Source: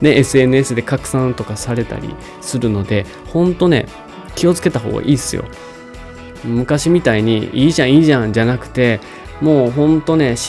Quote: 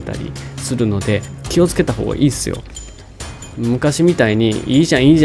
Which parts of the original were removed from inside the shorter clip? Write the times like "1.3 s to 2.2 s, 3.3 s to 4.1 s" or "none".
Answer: 3.2 s to 4.2 s